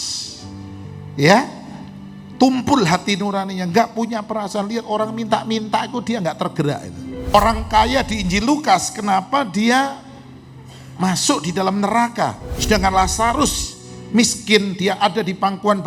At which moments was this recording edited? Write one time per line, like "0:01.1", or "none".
0:07.3
0:12.5